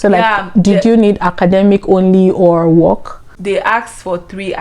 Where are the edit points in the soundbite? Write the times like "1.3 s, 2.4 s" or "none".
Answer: 3.3 s